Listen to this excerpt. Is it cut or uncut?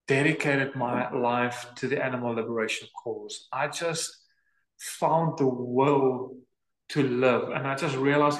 uncut